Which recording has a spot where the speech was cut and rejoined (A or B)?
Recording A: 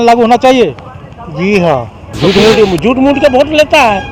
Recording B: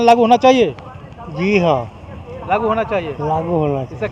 A